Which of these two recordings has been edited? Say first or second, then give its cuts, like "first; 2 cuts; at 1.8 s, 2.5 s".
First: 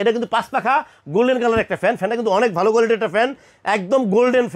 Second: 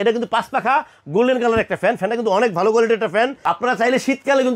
second; 1 cut; at 3.4 s